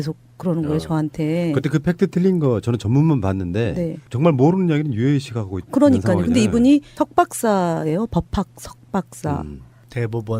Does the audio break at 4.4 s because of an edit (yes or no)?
no